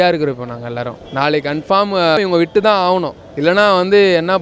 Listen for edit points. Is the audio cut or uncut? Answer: cut